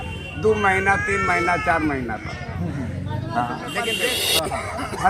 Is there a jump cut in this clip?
yes; 1 cut; at 3.9 s

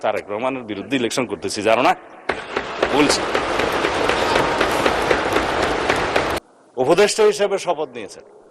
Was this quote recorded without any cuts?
no; 1 cut; at 6.4 s

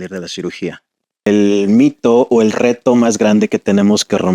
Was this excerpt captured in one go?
no; 1 cut; at 1.3 s

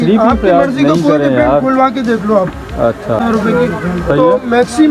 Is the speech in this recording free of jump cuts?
no; 1 cut; at 3.2 s

